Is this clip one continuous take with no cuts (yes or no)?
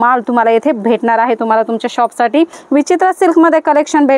no